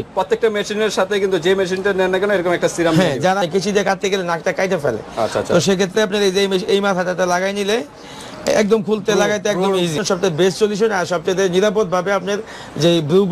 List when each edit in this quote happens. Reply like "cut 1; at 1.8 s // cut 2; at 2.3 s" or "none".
cut 1; at 3.4 s // cut 2; at 10.0 s